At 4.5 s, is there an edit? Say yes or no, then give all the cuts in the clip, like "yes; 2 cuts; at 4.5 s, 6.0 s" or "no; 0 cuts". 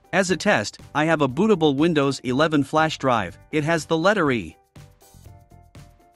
yes; 1 cut; at 4.5 s